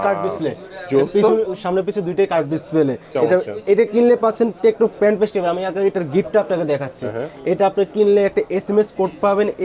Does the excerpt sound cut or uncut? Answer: uncut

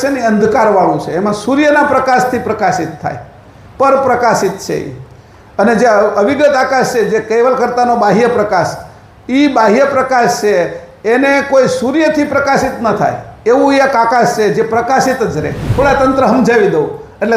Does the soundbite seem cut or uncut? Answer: cut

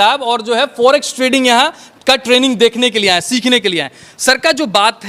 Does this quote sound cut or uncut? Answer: uncut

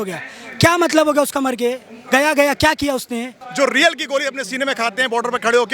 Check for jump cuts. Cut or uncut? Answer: cut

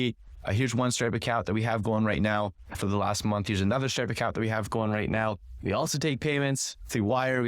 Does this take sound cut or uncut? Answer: cut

